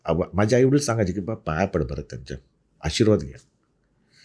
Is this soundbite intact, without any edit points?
yes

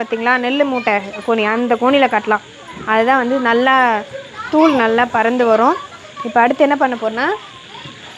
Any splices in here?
no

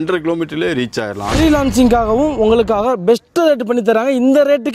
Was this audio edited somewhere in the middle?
yes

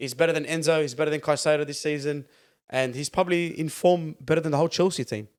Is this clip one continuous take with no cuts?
yes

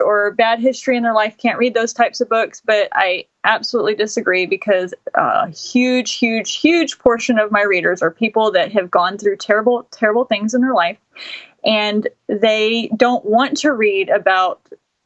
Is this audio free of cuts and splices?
yes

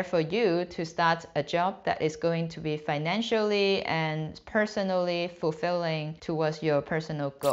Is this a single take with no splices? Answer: yes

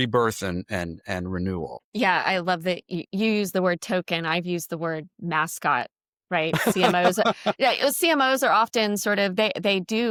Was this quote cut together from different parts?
no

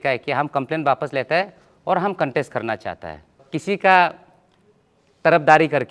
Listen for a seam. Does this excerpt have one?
yes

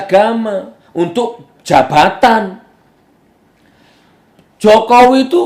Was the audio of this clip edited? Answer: yes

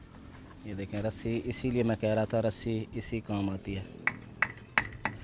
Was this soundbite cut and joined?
no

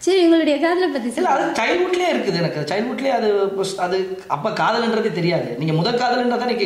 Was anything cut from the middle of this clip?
no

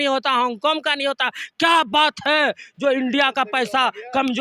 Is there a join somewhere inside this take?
no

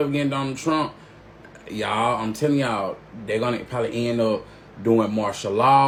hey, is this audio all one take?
yes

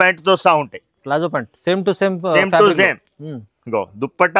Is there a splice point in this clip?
no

